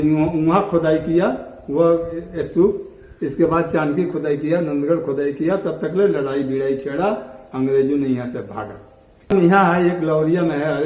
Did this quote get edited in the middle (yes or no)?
yes